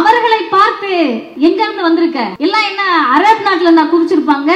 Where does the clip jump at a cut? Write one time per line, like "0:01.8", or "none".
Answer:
0:01.2
0:02.3

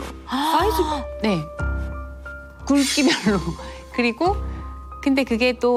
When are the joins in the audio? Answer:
none

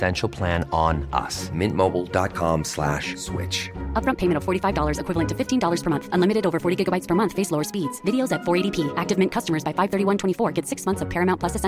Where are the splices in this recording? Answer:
none

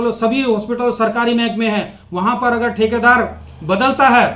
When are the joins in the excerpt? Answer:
none

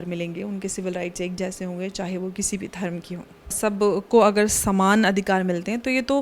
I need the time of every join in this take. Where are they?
0:03.6

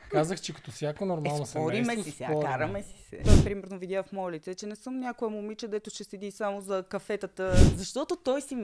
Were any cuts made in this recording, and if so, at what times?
0:03.1
0:07.6

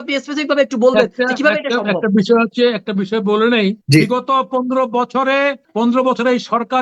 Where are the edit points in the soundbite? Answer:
0:03.8
0:05.6

